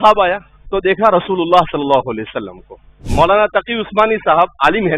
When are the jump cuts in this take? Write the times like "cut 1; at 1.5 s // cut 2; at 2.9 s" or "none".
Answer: cut 1; at 3.0 s